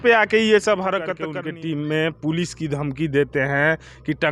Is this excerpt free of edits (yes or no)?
no